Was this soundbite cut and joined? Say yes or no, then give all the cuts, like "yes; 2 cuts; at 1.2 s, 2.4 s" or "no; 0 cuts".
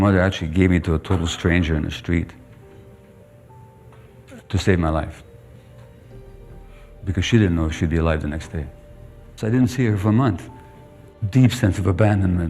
yes; 1 cut; at 9.2 s